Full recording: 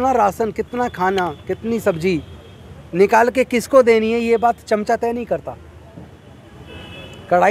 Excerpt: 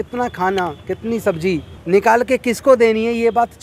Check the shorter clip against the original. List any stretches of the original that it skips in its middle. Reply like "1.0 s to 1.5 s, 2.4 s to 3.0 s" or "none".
2.3 s to 2.8 s